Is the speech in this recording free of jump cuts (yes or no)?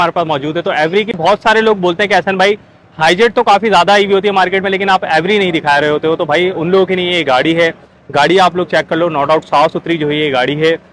yes